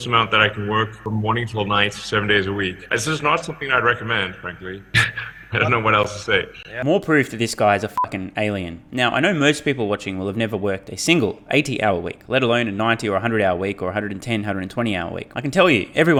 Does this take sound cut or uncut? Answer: uncut